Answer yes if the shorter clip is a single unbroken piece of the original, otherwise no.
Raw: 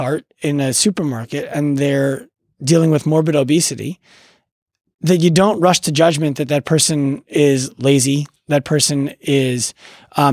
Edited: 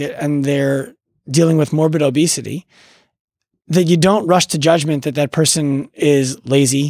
yes